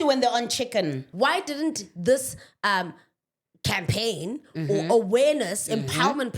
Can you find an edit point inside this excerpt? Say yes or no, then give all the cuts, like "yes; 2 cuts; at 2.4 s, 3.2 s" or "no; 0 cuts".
yes; 1 cut; at 1.1 s